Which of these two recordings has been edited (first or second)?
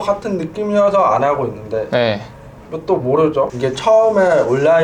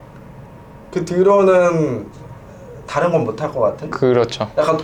first